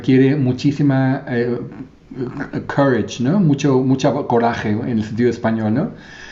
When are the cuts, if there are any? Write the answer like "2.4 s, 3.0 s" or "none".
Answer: none